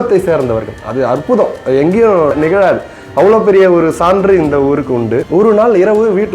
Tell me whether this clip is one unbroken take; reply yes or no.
no